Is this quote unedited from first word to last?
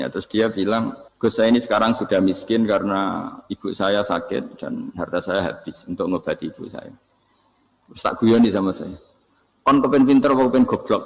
no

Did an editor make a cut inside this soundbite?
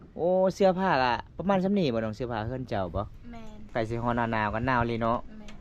yes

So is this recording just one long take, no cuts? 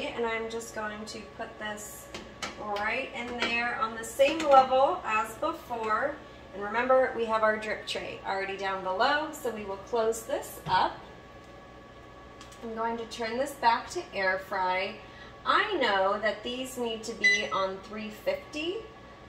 yes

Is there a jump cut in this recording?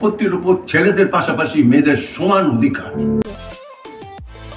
yes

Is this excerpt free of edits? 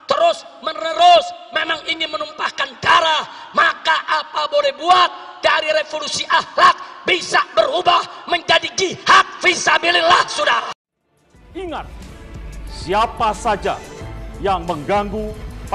no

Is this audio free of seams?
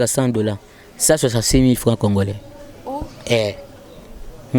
yes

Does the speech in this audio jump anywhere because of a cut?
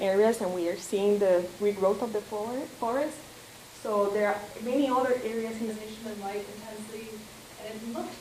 no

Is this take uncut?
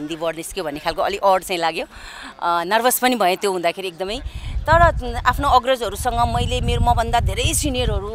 yes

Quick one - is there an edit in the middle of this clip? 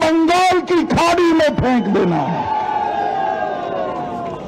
no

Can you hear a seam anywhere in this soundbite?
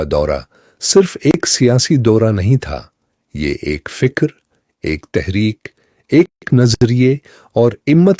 no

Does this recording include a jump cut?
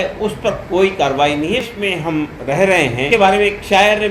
yes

